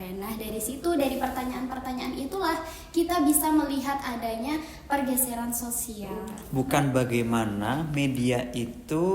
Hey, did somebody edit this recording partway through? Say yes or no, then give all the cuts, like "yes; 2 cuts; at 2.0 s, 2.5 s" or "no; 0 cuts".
yes; 1 cut; at 6.4 s